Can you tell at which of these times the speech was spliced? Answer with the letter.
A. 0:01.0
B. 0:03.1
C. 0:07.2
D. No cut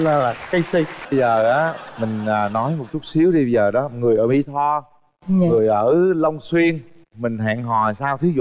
A